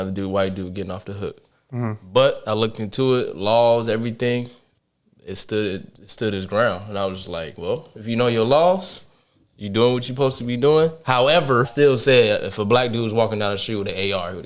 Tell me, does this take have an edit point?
yes; 1 cut; at 11.7 s

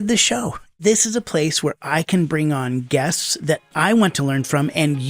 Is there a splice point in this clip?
yes; 2 cuts; at 0.8 s, 3.7 s

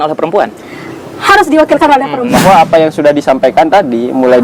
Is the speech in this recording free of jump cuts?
no; 1 cut; at 2.2 s

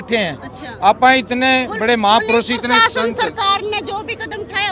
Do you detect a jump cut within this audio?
no; 0 cuts

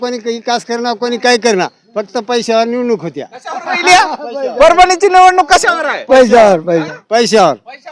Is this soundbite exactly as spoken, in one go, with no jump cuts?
yes; 0 cuts

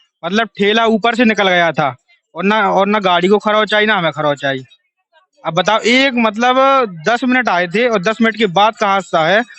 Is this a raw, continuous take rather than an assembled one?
yes; 0 cuts

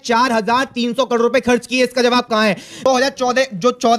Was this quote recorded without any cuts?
no; 1 cut; at 2.8 s

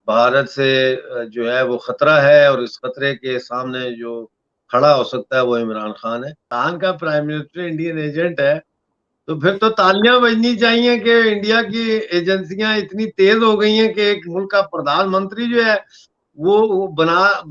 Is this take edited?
yes; 1 cut; at 6.5 s

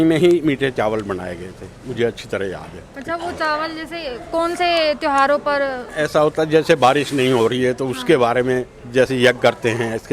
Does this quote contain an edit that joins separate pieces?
no; 0 cuts

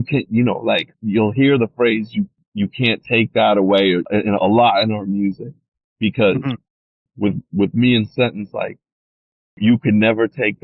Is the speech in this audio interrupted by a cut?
yes; 5 cuts; at 0.9 s, 2.4 s, 4.1 s, 7.1 s, 9.6 s

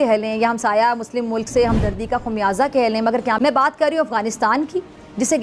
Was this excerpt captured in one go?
yes; 0 cuts

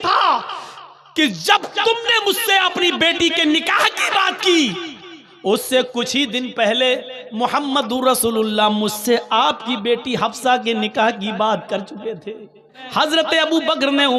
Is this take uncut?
no; 1 cut; at 12.8 s

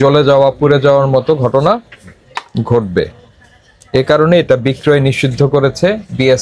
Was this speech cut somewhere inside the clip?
no; 0 cuts

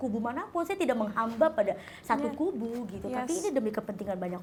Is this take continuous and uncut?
yes; 0 cuts

